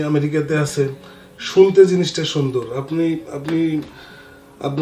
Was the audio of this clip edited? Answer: no; 0 cuts

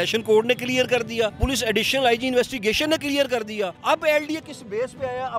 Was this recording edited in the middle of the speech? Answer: yes; 2 cuts; at 1.4 s, 3.8 s

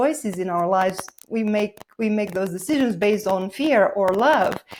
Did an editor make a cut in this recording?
no; 0 cuts

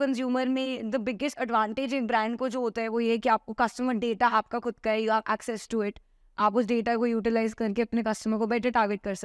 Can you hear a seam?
no; 0 cuts

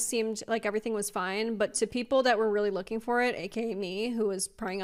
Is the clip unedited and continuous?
yes; 0 cuts

